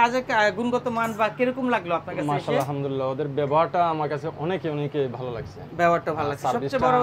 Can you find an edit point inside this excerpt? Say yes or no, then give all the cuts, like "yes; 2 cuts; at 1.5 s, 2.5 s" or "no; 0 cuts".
no; 0 cuts